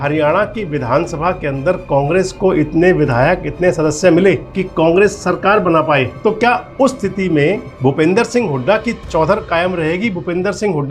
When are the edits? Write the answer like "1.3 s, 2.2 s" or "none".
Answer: 4.5 s, 6.1 s, 7.7 s